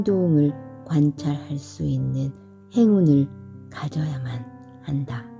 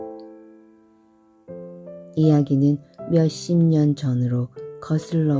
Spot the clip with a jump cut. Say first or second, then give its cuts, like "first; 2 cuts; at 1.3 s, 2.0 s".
second; 1 cut; at 2.1 s